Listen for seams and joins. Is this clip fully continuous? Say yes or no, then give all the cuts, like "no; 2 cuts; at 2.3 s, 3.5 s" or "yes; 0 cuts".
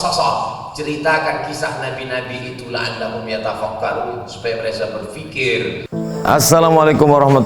no; 1 cut; at 5.9 s